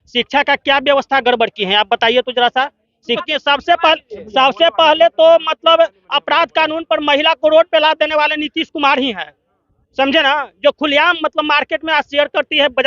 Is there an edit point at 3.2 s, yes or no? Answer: yes